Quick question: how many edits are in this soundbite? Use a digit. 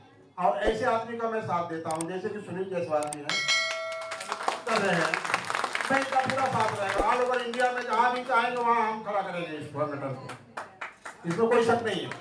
0